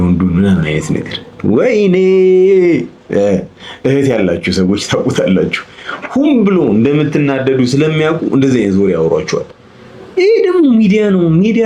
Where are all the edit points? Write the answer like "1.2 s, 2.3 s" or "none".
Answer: none